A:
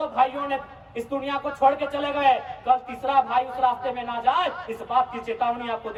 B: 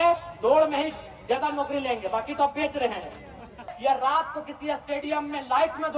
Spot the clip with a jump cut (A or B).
B